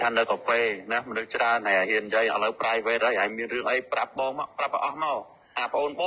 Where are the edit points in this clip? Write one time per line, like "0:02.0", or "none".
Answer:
none